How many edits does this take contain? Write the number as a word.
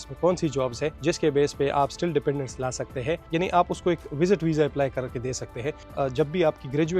three